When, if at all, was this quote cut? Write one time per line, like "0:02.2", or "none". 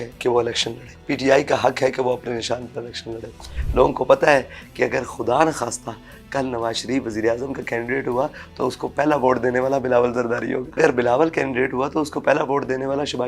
0:00.9
0:03.5
0:10.8